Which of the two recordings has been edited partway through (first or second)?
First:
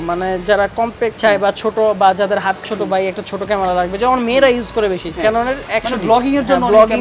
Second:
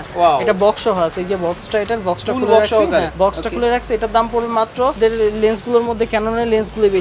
second